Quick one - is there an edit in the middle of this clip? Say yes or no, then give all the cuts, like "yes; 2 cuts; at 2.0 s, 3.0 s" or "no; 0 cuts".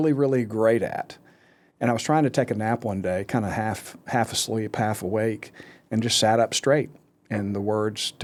no; 0 cuts